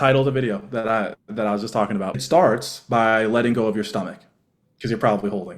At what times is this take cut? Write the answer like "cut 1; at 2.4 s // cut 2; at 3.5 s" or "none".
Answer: cut 1; at 2.1 s